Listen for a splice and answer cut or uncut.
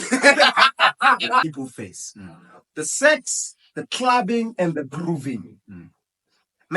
cut